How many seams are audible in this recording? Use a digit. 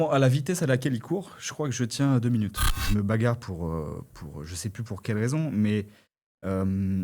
1